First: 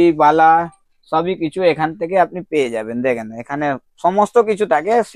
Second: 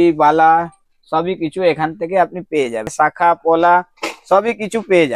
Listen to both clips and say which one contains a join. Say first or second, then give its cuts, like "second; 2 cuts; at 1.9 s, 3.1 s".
second; 1 cut; at 2.9 s